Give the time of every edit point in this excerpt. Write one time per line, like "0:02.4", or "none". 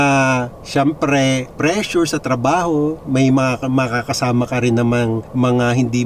none